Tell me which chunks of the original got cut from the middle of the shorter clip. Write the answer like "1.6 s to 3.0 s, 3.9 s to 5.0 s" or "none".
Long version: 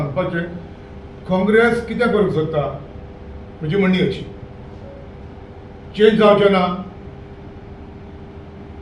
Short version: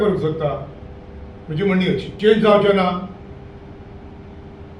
4.2 s to 5.9 s